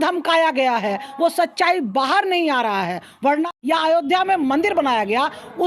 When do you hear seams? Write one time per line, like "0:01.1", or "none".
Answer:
0:03.5